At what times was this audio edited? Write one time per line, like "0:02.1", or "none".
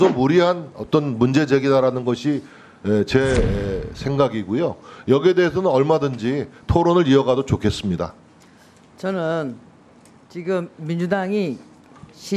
none